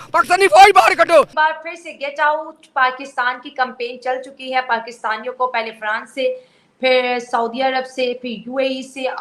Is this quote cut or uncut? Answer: cut